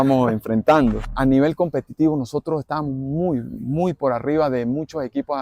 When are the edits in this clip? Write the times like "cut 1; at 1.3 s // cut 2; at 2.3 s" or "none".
cut 1; at 1.1 s